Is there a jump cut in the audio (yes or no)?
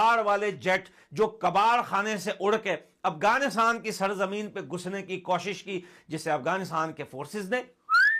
no